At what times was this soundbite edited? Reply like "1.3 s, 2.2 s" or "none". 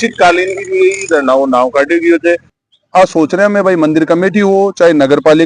2.5 s